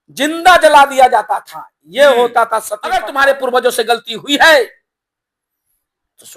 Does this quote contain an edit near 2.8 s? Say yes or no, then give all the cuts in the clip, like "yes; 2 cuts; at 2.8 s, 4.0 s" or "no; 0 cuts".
yes; 1 cut; at 2.8 s